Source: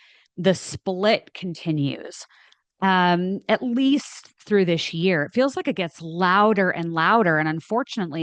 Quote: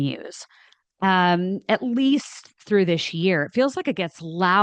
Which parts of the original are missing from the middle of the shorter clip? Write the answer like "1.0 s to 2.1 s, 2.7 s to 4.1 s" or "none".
none